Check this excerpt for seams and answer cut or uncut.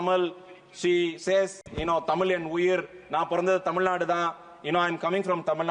uncut